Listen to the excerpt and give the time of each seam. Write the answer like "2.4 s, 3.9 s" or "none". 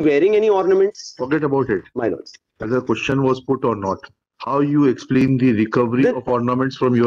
none